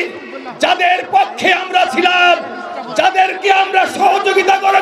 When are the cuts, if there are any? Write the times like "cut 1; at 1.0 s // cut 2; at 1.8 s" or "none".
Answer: none